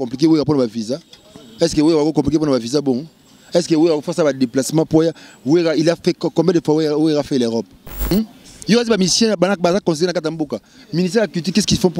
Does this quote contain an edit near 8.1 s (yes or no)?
yes